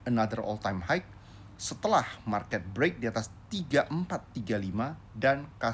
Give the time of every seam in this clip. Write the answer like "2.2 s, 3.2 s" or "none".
none